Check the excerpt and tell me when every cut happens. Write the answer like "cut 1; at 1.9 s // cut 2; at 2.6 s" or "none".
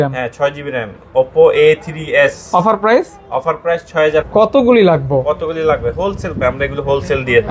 cut 1; at 4.3 s

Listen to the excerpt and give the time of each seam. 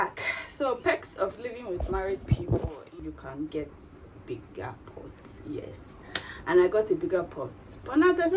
cut 1; at 2.8 s

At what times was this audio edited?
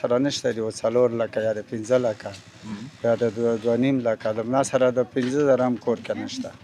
none

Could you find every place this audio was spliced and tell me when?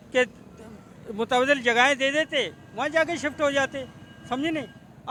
none

